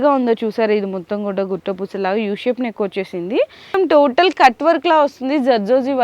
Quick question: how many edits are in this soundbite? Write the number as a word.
one